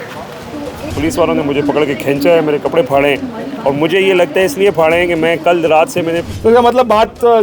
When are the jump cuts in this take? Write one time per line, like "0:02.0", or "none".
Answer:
0:00.9
0:06.3